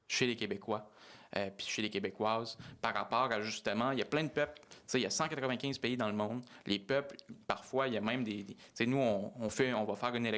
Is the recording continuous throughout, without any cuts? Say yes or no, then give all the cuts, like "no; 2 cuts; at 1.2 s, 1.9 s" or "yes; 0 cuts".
yes; 0 cuts